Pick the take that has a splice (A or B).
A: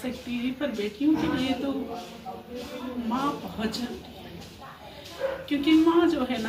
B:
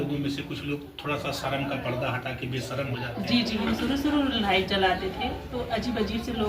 B